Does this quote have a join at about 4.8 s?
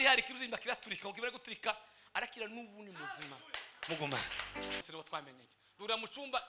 yes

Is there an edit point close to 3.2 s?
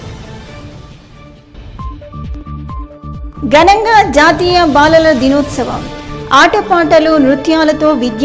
yes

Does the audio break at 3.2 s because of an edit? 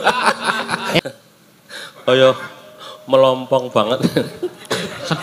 no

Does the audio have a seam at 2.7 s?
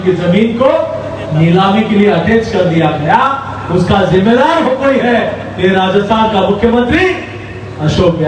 no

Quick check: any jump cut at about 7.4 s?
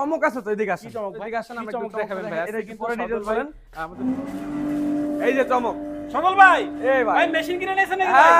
no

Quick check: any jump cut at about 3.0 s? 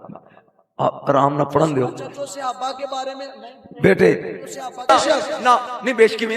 no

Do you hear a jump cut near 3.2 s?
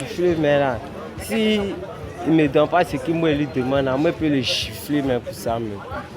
no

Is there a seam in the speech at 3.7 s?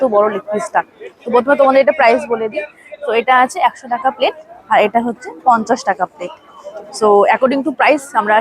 no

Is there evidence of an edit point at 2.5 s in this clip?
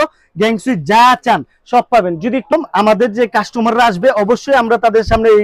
yes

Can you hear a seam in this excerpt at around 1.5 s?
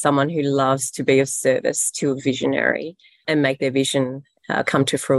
no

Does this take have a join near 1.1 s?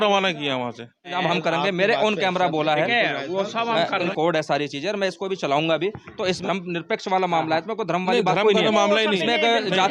yes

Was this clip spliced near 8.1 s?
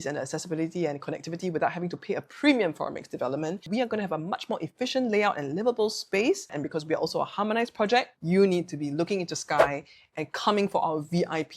yes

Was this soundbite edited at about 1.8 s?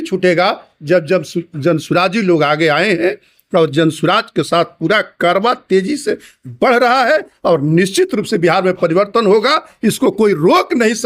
no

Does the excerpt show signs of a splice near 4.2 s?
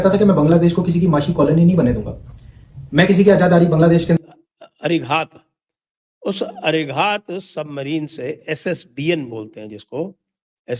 yes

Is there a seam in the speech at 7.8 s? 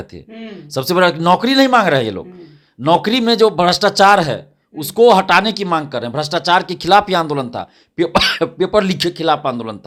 no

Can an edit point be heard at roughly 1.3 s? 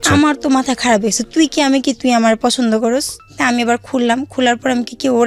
no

